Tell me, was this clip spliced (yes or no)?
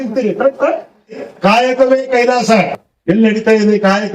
yes